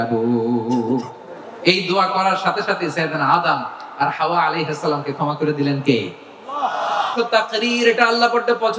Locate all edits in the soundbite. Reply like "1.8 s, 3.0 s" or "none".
7.1 s